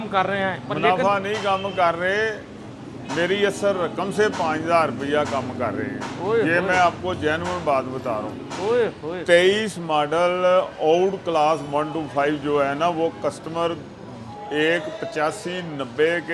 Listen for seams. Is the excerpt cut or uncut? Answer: uncut